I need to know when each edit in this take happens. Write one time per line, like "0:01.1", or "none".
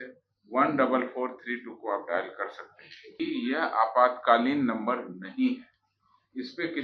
0:03.2